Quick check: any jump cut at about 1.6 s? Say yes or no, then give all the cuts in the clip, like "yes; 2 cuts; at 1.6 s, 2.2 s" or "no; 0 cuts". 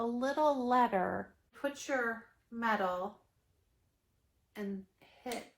yes; 1 cut; at 1.6 s